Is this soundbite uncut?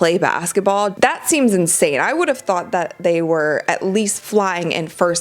no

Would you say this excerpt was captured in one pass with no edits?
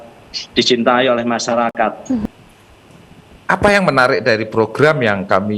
no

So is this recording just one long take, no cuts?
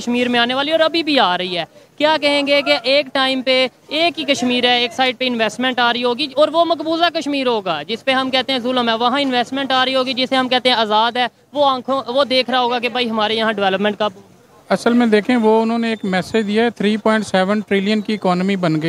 yes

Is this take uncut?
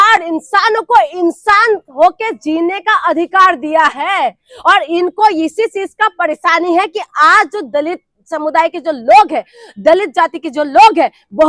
yes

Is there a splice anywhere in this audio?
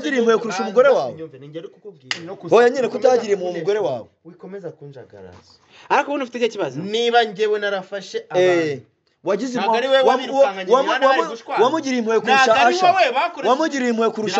no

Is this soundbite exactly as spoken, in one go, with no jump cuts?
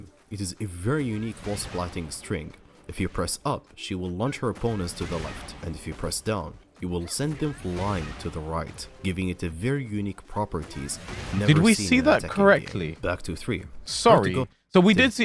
yes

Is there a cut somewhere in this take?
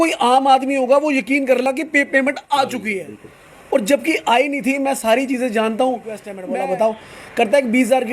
yes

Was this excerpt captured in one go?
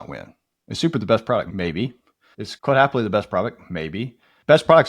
no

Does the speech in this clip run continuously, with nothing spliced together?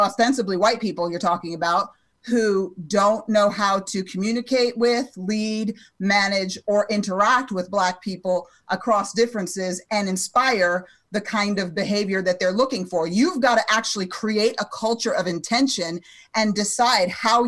yes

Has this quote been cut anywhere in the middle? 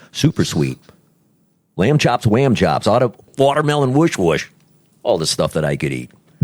yes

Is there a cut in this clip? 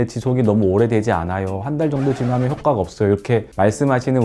no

